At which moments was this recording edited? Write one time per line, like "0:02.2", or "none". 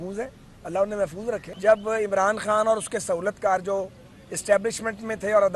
0:01.5